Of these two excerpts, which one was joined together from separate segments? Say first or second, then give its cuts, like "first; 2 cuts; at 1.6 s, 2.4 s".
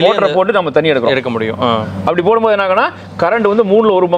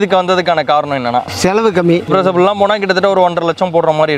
second; 1 cut; at 2.1 s